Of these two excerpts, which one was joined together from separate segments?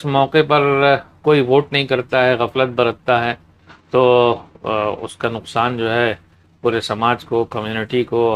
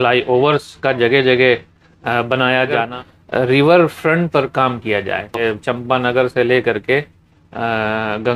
second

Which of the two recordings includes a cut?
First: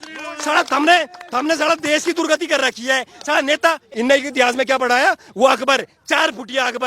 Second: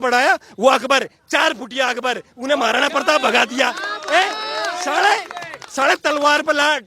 first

